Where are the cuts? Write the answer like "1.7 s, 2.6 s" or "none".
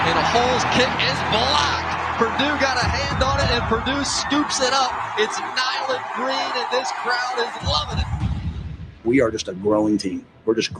none